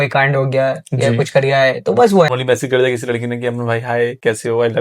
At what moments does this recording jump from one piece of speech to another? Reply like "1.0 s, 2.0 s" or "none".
2.3 s